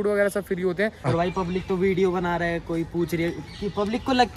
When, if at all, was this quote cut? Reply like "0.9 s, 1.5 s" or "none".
1.1 s